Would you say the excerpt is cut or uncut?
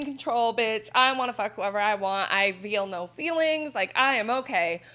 uncut